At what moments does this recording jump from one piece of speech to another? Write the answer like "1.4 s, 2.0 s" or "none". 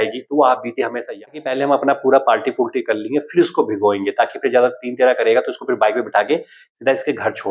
1.2 s